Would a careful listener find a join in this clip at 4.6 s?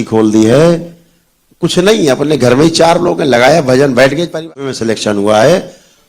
yes; 1 cut; at 4.6 s

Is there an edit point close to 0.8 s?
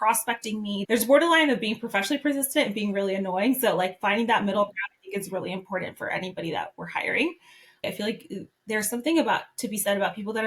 yes; 2 cuts; at 0.8 s, 7.8 s

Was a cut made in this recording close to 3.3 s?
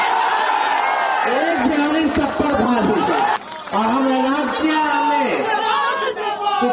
yes; 1 cut; at 3.3 s

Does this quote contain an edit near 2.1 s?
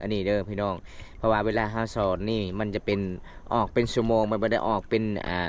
no; 0 cuts

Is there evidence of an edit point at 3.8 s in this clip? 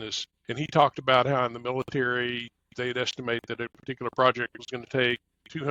yes; 1 cut; at 3.8 s

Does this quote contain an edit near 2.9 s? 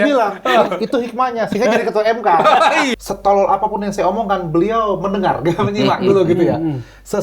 yes; 1 cut; at 2.9 s

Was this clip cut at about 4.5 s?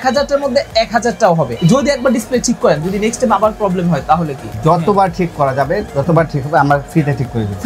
yes; 2 cuts; at 1.5 s, 4.5 s

